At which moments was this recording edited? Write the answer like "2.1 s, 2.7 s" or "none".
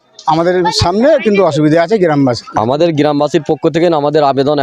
2.4 s